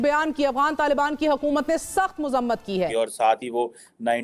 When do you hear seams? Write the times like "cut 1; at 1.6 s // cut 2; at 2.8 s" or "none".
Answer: cut 1; at 2.9 s

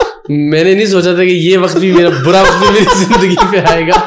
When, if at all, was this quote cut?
none

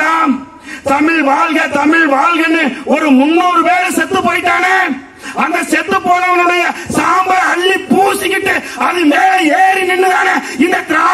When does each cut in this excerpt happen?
none

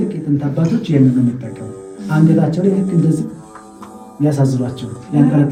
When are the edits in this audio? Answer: none

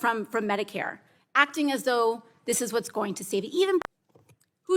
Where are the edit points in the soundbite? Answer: cut 1; at 3.8 s

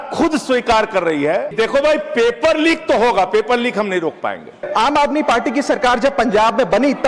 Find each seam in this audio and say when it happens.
cut 1; at 1.5 s // cut 2; at 4.6 s

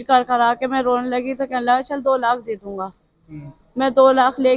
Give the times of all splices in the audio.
none

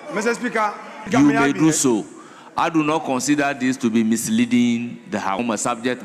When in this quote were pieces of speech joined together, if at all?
cut 1; at 1.0 s

